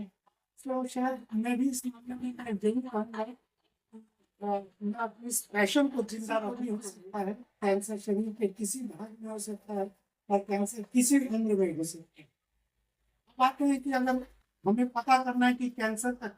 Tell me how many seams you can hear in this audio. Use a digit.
1